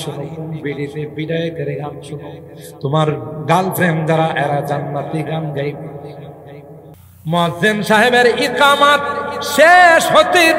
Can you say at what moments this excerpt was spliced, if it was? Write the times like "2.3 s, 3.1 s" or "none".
7.0 s